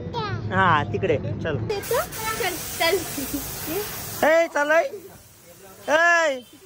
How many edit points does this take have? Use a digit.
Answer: 1